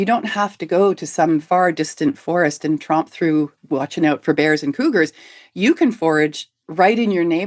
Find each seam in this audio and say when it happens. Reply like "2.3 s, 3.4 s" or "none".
1.4 s